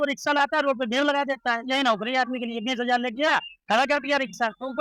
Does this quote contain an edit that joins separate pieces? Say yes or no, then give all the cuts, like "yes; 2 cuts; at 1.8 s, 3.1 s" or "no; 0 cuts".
no; 0 cuts